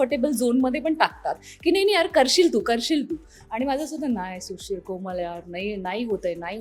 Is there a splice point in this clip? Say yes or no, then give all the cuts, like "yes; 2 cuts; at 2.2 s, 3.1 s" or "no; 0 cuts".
no; 0 cuts